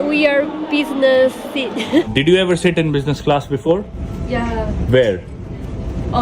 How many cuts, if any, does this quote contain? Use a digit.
2